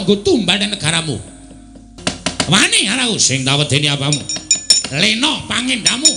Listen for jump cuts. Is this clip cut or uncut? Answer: cut